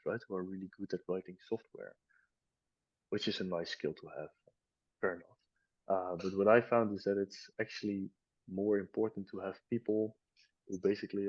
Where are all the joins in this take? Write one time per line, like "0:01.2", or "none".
none